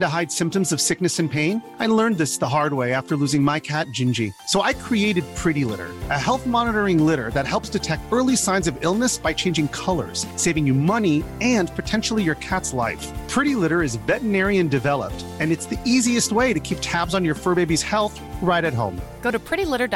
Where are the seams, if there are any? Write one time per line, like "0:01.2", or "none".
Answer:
none